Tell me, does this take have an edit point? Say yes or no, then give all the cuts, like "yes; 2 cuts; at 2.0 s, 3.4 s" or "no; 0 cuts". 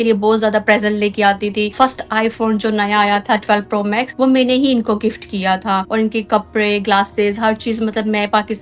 yes; 3 cuts; at 1.7 s, 4.1 s, 5.9 s